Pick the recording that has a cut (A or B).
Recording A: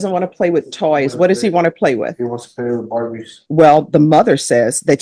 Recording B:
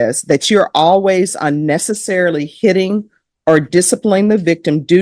A